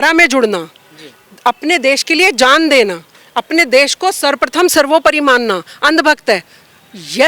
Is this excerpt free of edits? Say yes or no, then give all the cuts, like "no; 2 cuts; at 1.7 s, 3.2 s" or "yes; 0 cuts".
yes; 0 cuts